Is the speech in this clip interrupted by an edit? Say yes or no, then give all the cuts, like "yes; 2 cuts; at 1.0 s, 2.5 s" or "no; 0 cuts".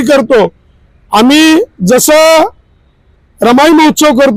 no; 0 cuts